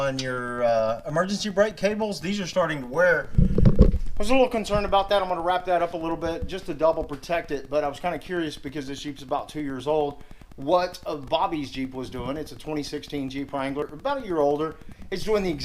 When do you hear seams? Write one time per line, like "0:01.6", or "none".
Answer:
0:13.9

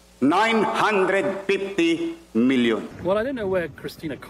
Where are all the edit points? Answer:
0:02.9

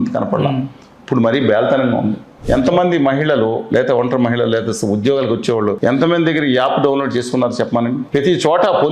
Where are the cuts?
0:02.3
0:05.8
0:08.0

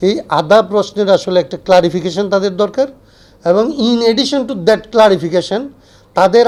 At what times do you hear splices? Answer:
none

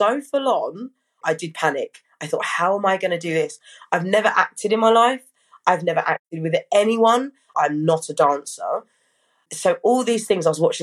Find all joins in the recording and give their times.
0:01.2
0:07.5
0:09.4

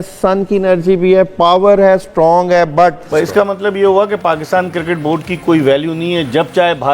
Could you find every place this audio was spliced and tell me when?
0:03.0

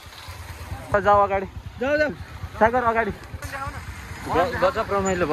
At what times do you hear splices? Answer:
0:00.9
0:03.5

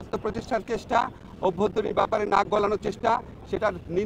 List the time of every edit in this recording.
none

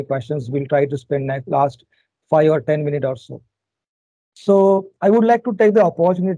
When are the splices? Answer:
none

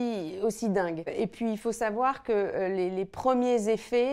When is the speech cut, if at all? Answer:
0:01.1

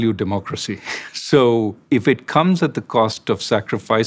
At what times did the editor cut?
0:01.8

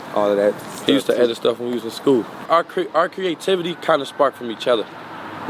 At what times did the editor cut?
0:02.4

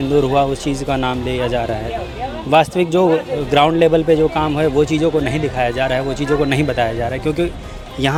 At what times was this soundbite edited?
none

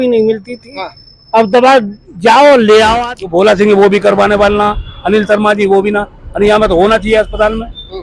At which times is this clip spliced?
0:03.1

